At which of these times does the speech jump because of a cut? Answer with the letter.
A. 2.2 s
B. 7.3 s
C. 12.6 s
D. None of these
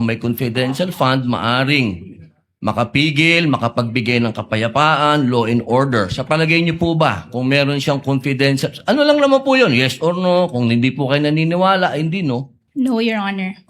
C